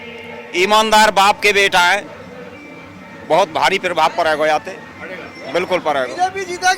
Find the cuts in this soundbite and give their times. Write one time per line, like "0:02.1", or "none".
none